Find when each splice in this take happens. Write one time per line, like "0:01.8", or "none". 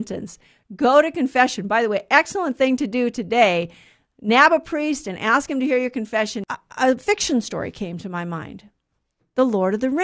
0:06.5